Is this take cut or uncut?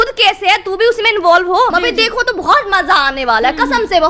cut